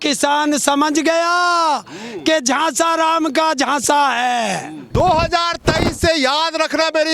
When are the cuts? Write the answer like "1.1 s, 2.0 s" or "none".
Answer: 4.8 s